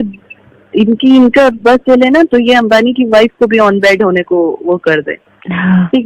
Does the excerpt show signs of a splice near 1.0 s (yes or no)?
no